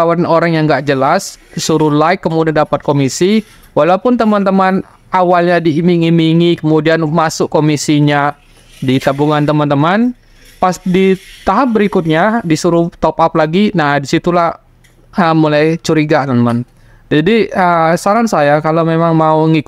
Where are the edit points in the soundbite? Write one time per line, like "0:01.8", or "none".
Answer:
none